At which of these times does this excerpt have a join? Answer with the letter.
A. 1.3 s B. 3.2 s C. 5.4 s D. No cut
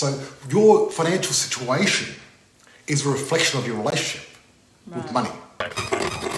C